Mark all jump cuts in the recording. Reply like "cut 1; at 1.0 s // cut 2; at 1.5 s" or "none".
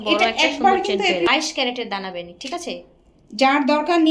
cut 1; at 1.3 s